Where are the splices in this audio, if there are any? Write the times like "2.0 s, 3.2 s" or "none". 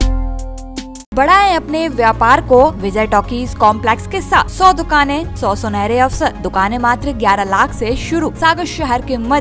1.1 s, 2.8 s, 4.5 s, 5.3 s, 6.4 s, 8.3 s